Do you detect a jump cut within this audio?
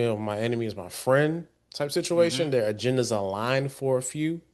no; 0 cuts

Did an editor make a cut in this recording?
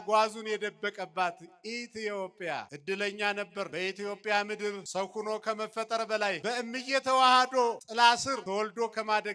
yes; 6 cuts; at 2.7 s, 3.7 s, 4.8 s, 6.4 s, 7.8 s, 8.4 s

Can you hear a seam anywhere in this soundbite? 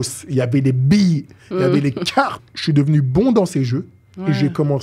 yes; 1 cut; at 2.4 s

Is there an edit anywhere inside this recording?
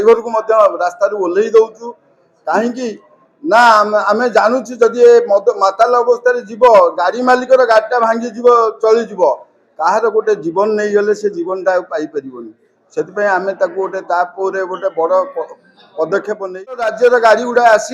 yes; 1 cut; at 16.9 s

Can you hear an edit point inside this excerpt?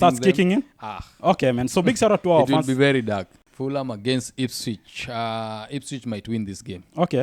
yes; 1 cut; at 3.4 s

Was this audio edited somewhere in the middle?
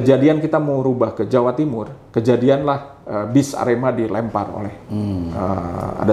no; 0 cuts

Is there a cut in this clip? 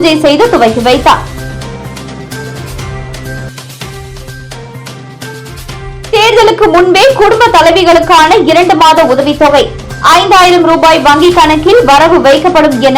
no; 0 cuts

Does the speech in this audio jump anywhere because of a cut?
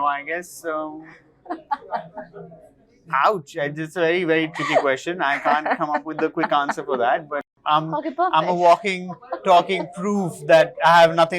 yes; 1 cut; at 7.5 s

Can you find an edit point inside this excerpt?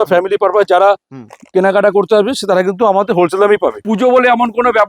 yes; 1 cut; at 3.8 s

